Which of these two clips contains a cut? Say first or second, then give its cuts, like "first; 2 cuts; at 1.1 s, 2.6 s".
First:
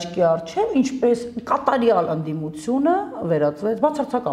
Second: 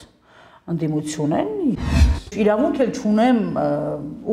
second; 1 cut; at 1.8 s